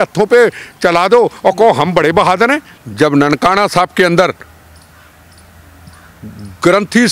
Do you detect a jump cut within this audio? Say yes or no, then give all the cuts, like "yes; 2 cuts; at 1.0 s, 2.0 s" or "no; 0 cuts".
yes; 1 cut; at 2.8 s